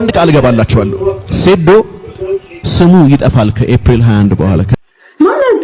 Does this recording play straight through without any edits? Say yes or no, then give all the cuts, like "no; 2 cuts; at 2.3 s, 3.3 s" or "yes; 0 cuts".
no; 1 cut; at 4.7 s